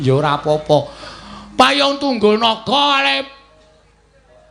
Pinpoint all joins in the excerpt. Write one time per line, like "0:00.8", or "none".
none